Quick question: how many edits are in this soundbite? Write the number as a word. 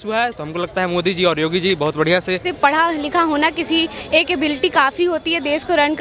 one